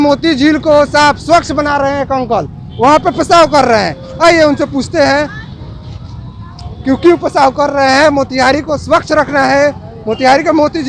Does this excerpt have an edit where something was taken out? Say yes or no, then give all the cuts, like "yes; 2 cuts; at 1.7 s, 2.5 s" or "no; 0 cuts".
no; 0 cuts